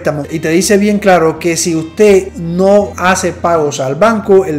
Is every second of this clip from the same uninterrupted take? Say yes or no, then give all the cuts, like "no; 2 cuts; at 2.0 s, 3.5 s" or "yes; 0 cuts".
yes; 0 cuts